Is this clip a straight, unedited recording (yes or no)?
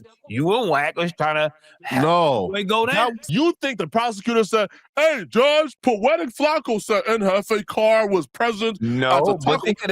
no